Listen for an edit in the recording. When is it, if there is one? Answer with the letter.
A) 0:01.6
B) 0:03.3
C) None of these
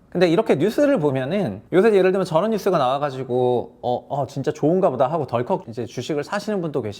A